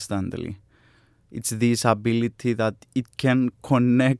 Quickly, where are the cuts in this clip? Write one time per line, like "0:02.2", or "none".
none